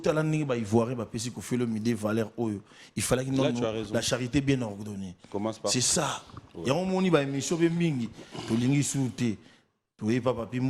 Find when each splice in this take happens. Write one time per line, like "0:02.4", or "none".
none